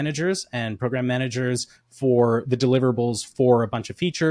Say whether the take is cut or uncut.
uncut